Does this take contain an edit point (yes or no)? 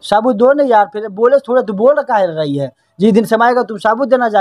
no